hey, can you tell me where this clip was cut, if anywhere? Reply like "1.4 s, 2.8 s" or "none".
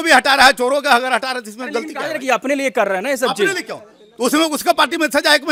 none